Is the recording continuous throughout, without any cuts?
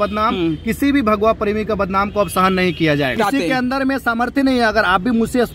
no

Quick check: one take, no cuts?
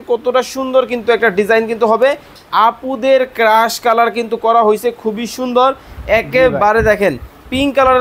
no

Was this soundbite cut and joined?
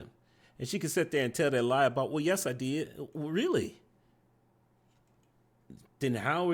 no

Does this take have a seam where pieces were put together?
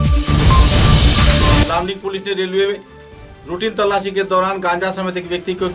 yes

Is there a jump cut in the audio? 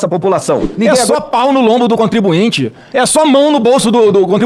yes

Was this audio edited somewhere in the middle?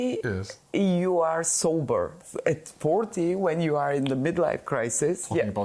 yes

